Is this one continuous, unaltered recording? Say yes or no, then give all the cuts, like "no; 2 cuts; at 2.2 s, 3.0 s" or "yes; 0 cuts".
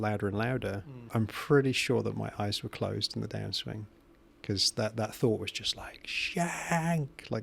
no; 1 cut; at 1.0 s